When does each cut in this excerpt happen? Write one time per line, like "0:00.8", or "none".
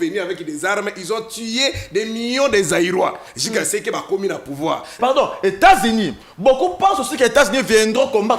0:05.0